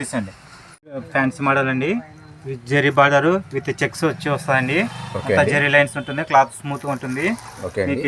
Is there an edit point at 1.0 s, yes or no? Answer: yes